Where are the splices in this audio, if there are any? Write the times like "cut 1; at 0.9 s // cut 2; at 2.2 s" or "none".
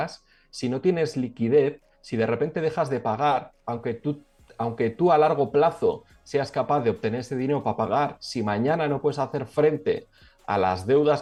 none